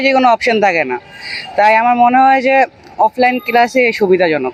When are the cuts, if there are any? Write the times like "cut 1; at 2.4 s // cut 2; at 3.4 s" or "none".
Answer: none